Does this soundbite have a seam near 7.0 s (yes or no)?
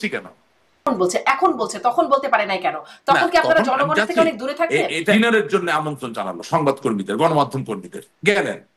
no